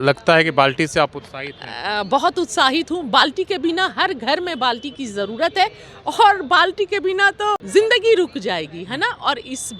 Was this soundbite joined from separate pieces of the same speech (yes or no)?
yes